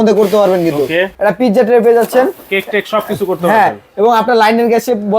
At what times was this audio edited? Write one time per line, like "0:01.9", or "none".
0:01.1

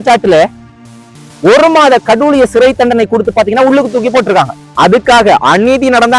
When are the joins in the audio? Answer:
0:04.6

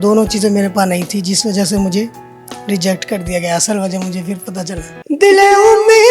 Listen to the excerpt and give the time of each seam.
0:04.9

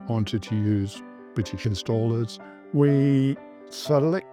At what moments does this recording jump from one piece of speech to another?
0:02.4

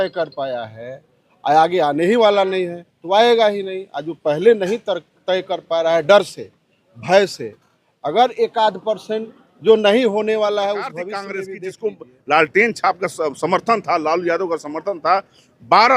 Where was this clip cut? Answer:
0:11.3

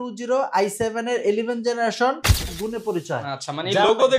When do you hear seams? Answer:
0:02.6

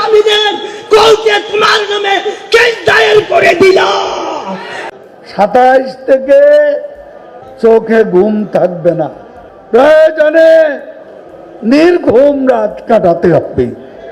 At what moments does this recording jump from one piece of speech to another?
0:04.9

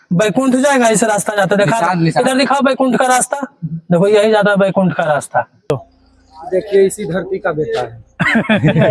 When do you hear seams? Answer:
0:05.7

